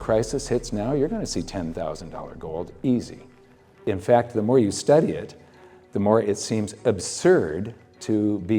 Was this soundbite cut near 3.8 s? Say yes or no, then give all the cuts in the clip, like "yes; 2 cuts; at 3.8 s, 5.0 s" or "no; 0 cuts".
yes; 1 cut; at 3.8 s